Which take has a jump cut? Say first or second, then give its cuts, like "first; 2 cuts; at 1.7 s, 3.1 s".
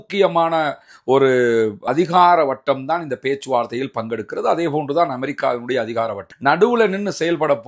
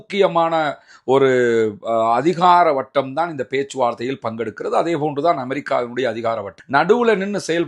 first; 1 cut; at 1.9 s